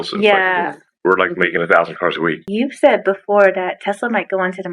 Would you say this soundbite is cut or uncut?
cut